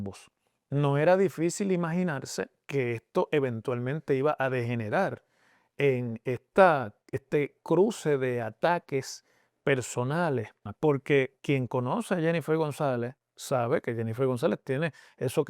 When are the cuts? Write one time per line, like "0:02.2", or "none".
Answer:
0:10.6